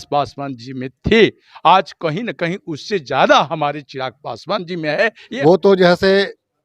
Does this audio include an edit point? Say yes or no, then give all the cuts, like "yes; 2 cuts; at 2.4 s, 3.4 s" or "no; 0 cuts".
yes; 1 cut; at 5.2 s